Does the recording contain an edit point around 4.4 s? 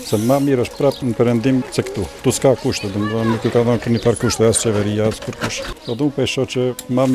no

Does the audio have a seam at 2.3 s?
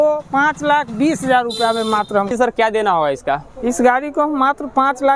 yes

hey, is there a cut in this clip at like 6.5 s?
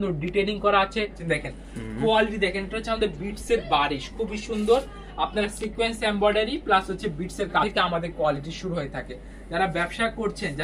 no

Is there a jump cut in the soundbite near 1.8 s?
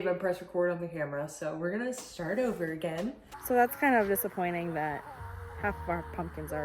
no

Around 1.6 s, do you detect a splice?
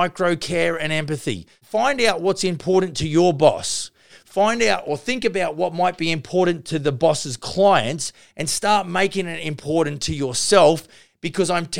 yes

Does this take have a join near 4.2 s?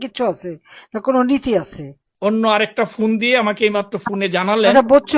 no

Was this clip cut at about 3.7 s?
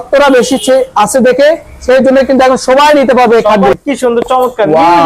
yes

